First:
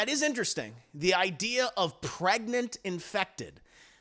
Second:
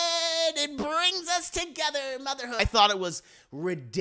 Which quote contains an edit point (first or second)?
second